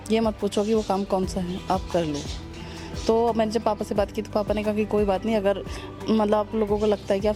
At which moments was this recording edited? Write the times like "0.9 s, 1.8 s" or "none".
none